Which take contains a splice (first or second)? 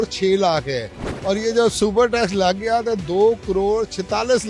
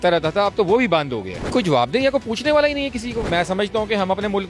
second